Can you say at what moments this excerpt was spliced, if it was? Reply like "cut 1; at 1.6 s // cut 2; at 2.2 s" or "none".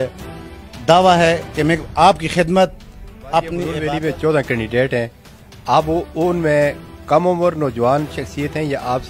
cut 1; at 3.8 s